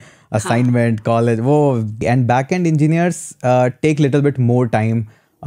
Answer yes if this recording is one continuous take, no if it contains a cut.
no